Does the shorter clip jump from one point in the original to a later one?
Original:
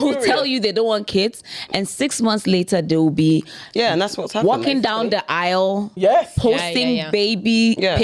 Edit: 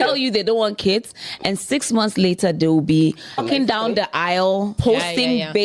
yes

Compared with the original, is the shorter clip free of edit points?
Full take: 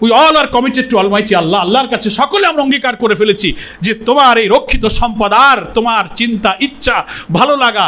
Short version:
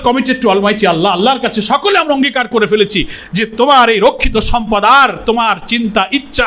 yes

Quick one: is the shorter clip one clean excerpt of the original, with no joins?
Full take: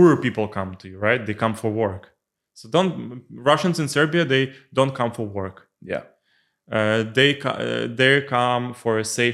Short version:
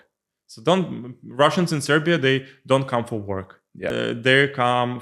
no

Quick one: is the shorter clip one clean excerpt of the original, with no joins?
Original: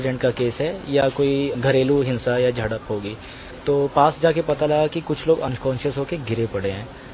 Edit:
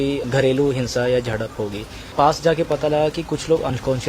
no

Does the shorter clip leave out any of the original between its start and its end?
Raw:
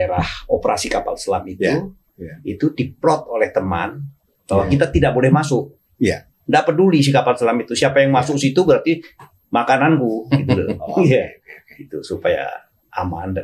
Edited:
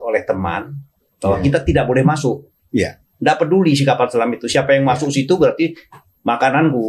no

